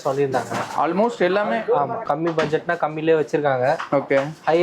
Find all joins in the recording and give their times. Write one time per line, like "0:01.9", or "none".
0:02.0